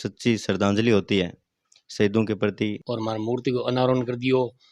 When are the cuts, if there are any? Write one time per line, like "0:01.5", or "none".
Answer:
0:02.8